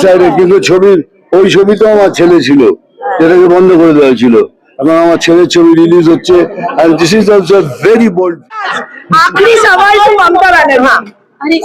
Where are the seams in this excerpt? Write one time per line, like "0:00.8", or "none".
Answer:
0:08.4